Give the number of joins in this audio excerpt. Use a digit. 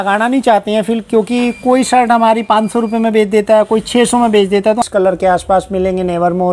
1